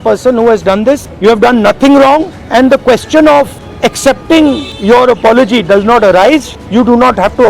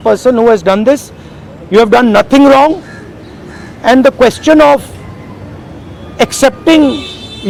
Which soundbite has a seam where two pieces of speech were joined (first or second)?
first